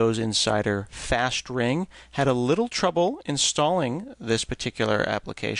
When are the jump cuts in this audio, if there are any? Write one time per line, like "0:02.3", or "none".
none